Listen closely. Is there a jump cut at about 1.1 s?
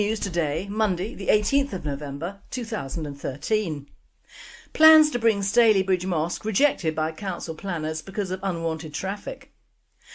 yes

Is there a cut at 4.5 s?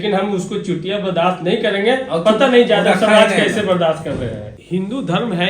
yes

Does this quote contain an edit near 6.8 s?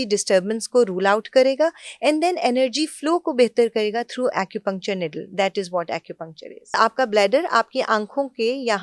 yes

